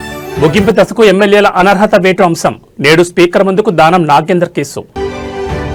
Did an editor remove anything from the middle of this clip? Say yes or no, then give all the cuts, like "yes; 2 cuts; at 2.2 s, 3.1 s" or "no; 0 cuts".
no; 0 cuts